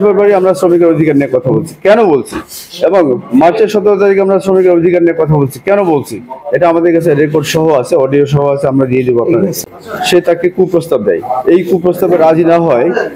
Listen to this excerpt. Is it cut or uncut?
cut